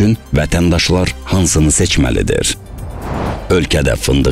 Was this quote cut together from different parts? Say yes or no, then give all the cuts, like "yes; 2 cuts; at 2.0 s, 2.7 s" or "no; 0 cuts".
yes; 1 cut; at 3.0 s